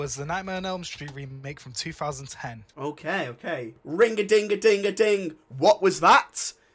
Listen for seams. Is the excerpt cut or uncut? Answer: cut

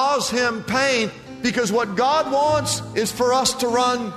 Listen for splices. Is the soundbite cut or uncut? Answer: cut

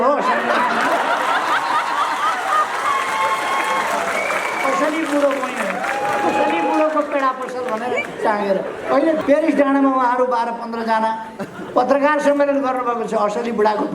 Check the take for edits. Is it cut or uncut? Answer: cut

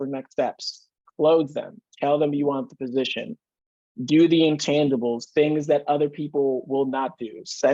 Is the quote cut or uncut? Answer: uncut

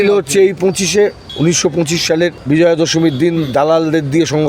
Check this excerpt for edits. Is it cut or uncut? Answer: cut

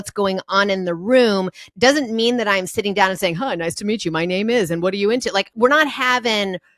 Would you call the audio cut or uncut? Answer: cut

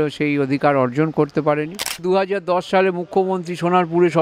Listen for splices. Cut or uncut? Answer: cut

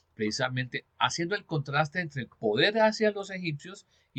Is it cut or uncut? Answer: uncut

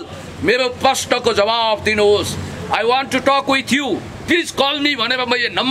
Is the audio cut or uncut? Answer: cut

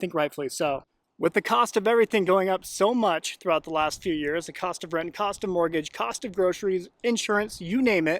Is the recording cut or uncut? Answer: cut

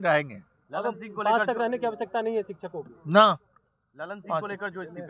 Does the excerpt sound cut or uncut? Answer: uncut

